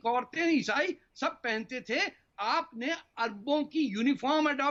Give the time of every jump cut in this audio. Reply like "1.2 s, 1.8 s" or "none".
none